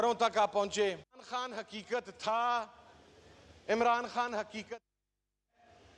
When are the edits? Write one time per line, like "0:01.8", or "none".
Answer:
0:01.1